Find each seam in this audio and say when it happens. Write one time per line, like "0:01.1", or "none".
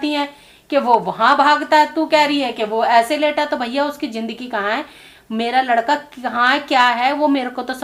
none